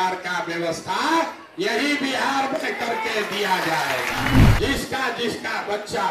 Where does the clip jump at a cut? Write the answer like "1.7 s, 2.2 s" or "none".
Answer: 4.5 s